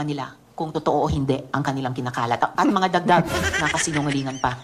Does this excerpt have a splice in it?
no; 0 cuts

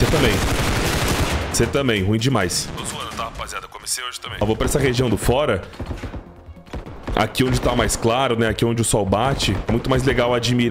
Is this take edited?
yes; 2 cuts; at 2.6 s, 4.2 s

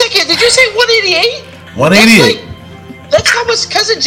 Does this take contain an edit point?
no; 0 cuts

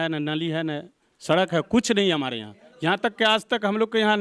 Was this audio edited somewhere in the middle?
no; 0 cuts

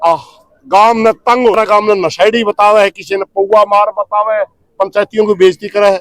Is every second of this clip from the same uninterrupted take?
no; 1 cut; at 1.5 s

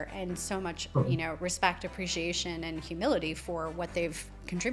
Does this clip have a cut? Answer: no; 0 cuts

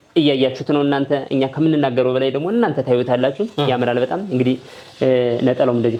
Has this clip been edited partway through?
no; 0 cuts

